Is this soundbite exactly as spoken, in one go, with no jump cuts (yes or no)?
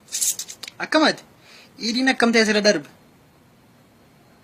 yes